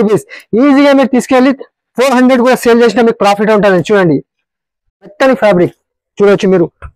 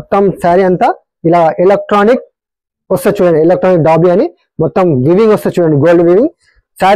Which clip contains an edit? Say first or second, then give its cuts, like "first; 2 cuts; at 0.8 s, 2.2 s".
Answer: first; 1 cut; at 5.1 s